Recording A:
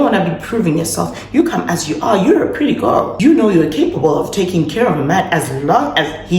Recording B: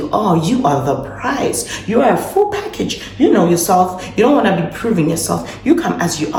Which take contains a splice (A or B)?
A